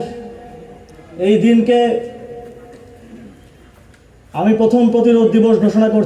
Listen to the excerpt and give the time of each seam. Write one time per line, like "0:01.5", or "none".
none